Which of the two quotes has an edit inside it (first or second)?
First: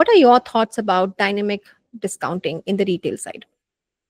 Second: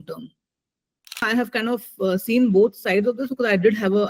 second